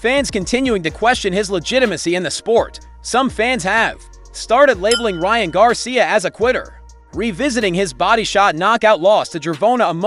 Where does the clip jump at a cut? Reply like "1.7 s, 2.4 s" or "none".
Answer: 6.8 s